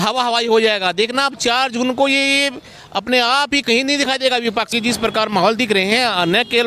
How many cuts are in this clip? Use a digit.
1